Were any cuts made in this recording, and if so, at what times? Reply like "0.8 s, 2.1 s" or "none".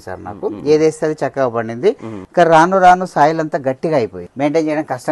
2.1 s, 4.2 s